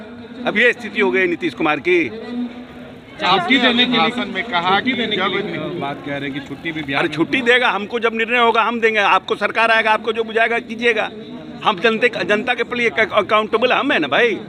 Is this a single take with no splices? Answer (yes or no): yes